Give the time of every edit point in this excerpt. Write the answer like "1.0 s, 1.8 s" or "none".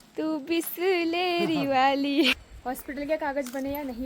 2.3 s